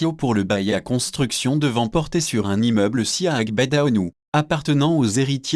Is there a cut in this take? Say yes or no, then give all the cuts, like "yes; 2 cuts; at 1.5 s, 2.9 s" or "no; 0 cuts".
yes; 1 cut; at 3.5 s